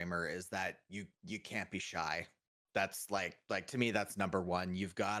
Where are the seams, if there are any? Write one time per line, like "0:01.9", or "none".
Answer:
none